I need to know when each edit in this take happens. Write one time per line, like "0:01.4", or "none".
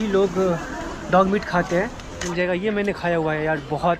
0:02.2